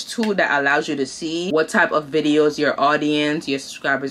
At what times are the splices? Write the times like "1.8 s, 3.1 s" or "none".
1.5 s